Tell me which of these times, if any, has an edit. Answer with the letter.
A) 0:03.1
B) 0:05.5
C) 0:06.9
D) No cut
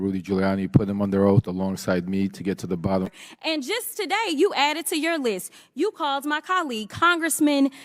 A